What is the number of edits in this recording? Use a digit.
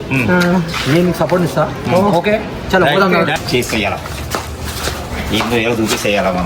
1